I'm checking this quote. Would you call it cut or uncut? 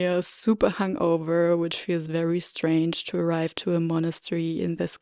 uncut